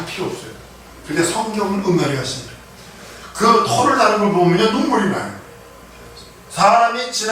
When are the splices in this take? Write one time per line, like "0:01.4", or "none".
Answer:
none

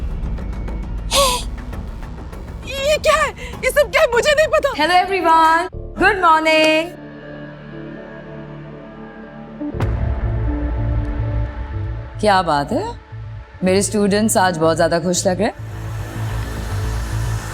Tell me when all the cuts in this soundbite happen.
0:04.7

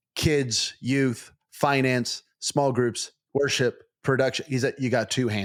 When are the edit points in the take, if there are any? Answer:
none

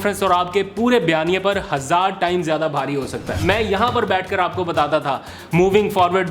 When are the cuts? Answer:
0:03.4

